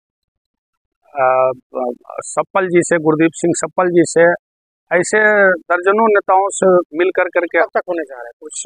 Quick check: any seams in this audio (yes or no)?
yes